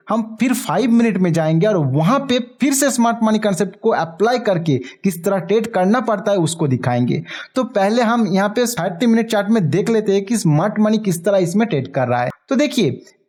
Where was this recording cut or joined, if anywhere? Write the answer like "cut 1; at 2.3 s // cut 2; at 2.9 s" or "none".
none

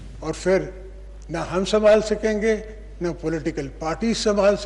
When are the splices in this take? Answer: none

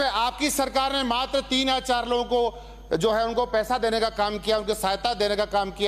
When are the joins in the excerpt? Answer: none

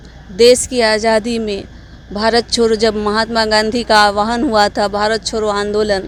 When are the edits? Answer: none

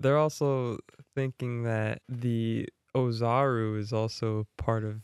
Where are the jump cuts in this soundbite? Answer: cut 1; at 2.1 s

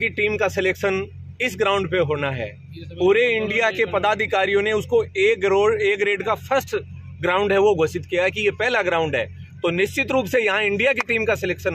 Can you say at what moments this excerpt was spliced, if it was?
none

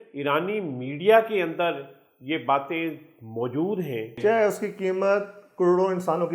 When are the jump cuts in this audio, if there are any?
cut 1; at 4.1 s

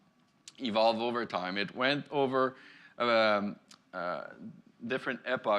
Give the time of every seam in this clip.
cut 1; at 4.0 s

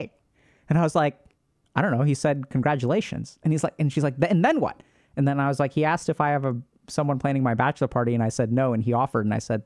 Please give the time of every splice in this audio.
none

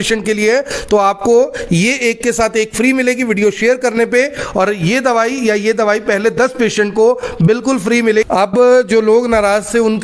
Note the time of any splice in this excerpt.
cut 1; at 8.3 s

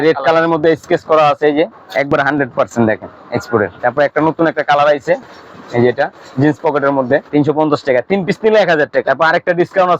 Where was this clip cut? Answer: cut 1; at 1.8 s // cut 2; at 3.8 s // cut 3; at 7.3 s // cut 4; at 9.1 s

